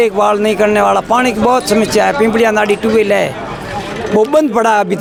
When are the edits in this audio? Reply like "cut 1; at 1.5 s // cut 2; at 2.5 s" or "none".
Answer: none